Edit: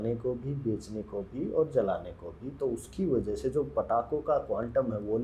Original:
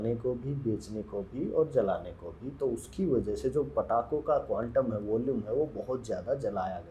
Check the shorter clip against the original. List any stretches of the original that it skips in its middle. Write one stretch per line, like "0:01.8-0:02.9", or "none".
none